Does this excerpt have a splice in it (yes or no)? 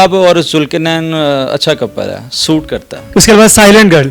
yes